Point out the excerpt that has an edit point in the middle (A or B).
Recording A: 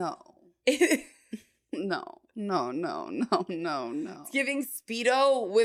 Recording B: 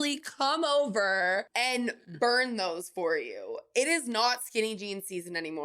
B